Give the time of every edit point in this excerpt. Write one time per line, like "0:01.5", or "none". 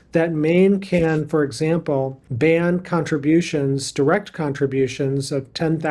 0:02.2